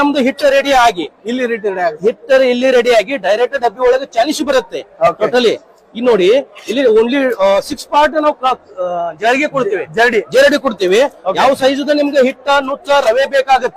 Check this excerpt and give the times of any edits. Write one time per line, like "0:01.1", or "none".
none